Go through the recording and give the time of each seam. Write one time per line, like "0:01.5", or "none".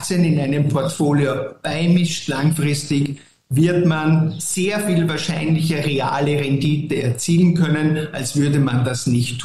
none